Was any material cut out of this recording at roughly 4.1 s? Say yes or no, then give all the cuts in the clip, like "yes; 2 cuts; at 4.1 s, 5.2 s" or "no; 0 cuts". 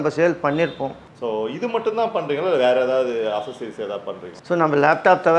no; 1 cut; at 1.3 s